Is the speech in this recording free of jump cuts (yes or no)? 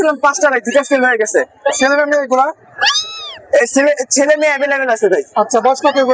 yes